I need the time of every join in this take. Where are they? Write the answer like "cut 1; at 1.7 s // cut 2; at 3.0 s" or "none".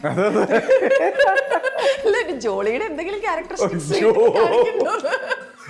none